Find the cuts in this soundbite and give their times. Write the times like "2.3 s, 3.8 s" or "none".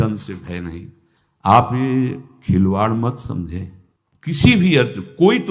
none